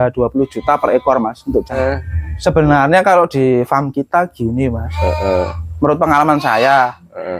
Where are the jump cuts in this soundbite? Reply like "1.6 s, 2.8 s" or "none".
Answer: 1.8 s